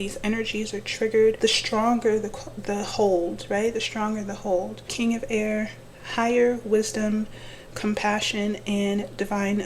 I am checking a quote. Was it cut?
yes; 2 cuts; at 1.4 s, 4.9 s

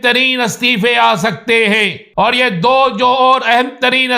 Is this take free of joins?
no; 1 cut; at 2.0 s

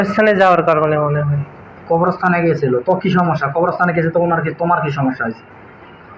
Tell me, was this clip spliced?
no; 0 cuts

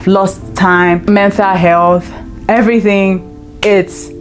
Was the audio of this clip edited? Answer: yes; 1 cut; at 1.0 s

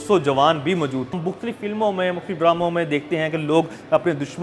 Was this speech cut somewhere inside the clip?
yes; 1 cut; at 1.2 s

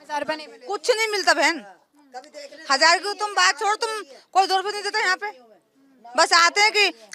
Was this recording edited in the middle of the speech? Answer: no; 0 cuts

